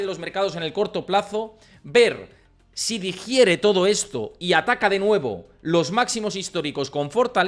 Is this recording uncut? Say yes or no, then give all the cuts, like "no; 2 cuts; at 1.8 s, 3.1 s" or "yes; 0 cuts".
yes; 0 cuts